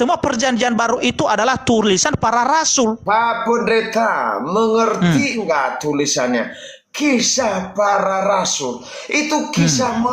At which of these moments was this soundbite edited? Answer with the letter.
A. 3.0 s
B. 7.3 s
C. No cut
A